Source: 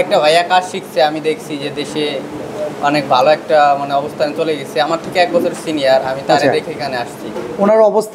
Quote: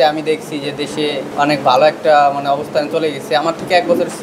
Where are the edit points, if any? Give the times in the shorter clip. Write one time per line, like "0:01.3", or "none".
0:01.3